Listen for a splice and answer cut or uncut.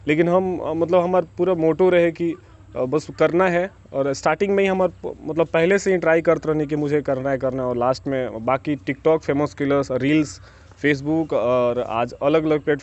uncut